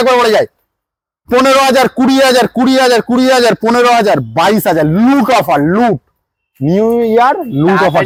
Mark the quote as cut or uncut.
uncut